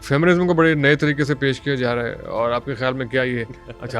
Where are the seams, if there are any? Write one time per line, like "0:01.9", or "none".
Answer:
none